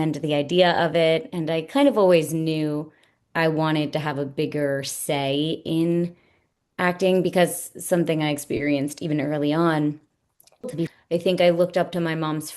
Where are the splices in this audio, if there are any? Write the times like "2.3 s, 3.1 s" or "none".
10.8 s